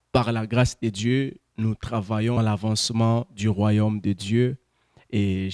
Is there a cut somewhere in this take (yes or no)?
yes